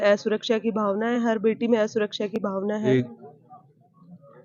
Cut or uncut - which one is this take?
cut